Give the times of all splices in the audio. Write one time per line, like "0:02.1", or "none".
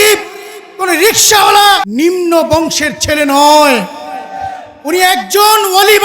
0:01.9